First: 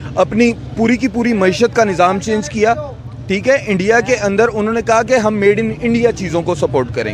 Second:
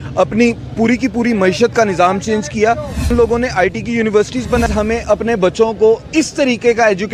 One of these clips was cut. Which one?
second; 2 cuts; at 3.1 s, 4.7 s

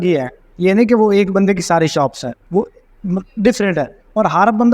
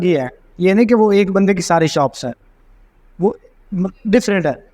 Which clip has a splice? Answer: first; 1 cut; at 2.3 s

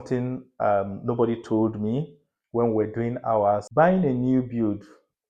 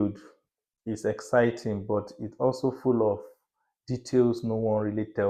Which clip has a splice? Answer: first; 1 cut; at 3.7 s

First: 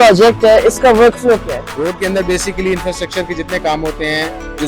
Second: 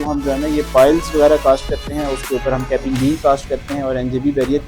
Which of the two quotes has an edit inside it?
first; 1 cut; at 1.6 s

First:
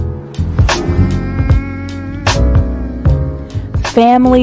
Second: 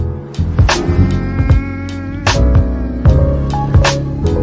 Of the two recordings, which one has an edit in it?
first; 1 cut; at 2.8 s

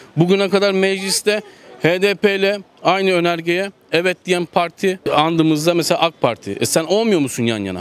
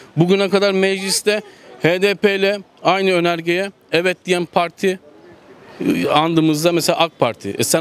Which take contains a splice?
first; 1 cut; at 5.0 s

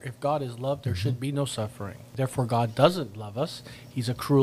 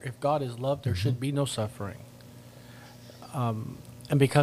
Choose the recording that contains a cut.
first; 1 cut; at 2.0 s

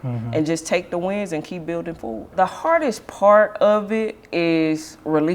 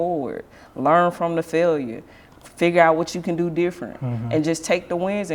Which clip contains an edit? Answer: first; 1 cut; at 2.3 s

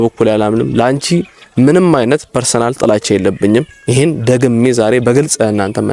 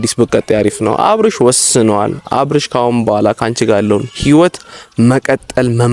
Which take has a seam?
first; 1 cut; at 3.8 s

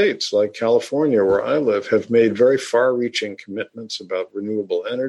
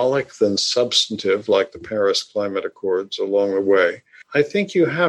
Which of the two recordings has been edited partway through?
second; 1 cut; at 4.2 s

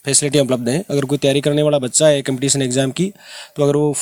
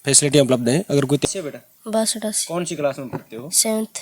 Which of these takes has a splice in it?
second; 1 cut; at 1.2 s

